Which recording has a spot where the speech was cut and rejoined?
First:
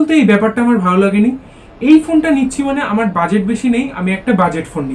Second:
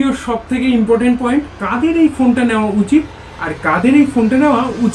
second; 1 cut; at 1.6 s

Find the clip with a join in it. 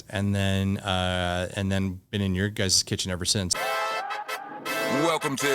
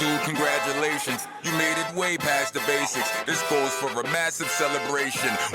first; 1 cut; at 3.5 s

